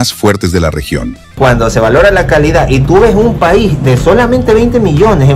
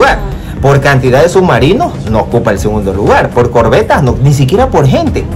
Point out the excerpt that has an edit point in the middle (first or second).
first